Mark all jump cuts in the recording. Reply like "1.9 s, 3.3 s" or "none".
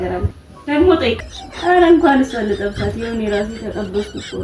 1.2 s